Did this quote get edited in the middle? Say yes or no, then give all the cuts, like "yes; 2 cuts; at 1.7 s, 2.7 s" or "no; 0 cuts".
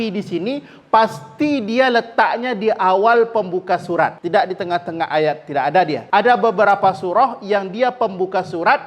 yes; 2 cuts; at 4.2 s, 6.0 s